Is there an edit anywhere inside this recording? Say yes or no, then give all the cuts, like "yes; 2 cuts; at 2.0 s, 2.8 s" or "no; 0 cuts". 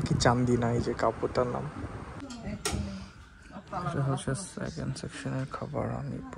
yes; 1 cut; at 2.4 s